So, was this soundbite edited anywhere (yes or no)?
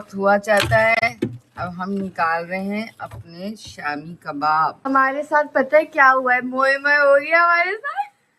yes